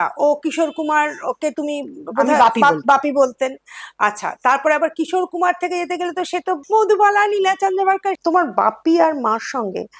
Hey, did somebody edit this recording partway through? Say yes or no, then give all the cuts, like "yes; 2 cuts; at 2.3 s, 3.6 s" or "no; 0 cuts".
yes; 1 cut; at 8.2 s